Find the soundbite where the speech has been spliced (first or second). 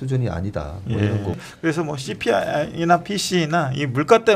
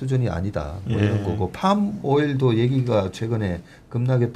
first